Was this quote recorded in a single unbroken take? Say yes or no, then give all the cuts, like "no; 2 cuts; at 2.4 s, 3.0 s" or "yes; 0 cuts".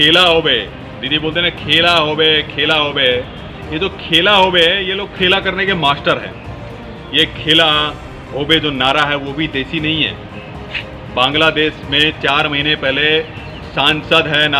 yes; 0 cuts